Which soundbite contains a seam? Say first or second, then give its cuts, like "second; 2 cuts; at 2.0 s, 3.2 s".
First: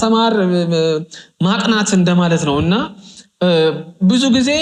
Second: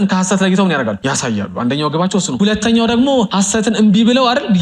second; 3 cuts; at 1.0 s, 2.3 s, 3.3 s